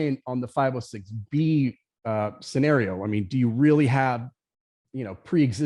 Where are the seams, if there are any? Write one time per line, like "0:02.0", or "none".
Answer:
none

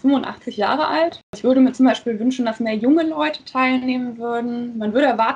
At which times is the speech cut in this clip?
0:01.4

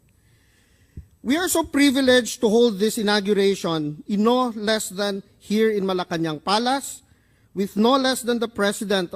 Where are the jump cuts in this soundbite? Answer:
0:05.5

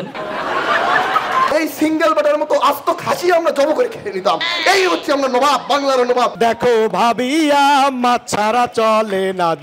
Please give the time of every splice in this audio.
0:01.5
0:06.3

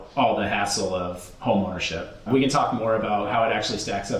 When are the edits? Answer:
0:02.2
0:03.3

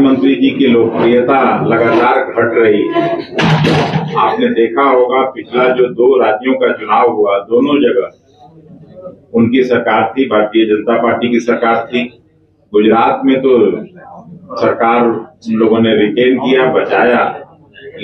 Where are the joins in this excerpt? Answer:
none

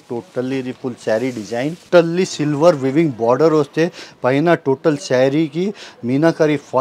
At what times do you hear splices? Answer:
0:01.8

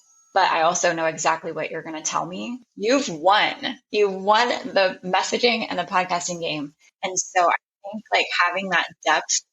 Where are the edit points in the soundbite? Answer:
0:02.6
0:06.8

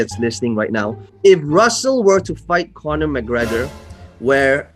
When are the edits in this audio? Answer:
0:01.0

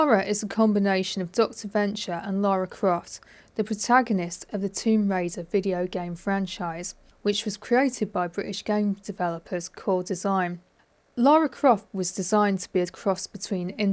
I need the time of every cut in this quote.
none

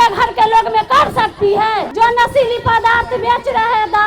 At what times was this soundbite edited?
0:01.9

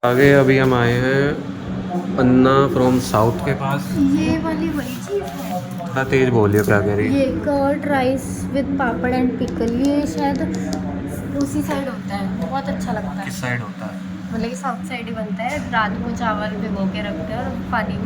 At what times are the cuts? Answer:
none

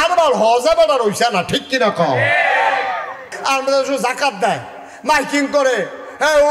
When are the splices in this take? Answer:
0:03.3

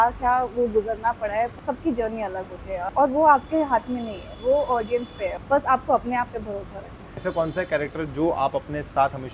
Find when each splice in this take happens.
0:01.5
0:02.9
0:05.4
0:07.1

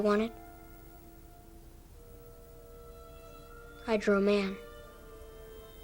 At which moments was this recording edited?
none

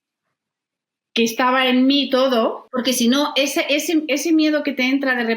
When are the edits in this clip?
0:02.6

